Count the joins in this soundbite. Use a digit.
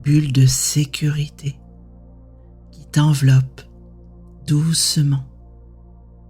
0